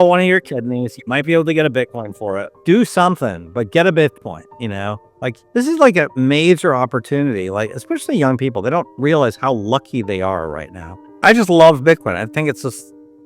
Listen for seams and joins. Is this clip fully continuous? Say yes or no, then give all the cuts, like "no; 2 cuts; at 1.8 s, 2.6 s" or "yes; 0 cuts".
no; 3 cuts; at 2.6 s, 5.4 s, 11.1 s